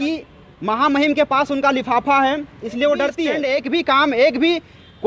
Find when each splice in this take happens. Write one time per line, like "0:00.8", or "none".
0:03.4